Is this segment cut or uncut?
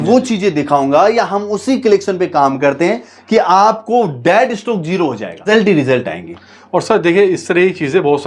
cut